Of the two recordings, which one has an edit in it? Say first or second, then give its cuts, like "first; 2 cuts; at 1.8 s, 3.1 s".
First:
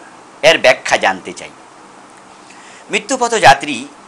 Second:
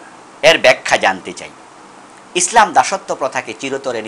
first; 1 cut; at 2.3 s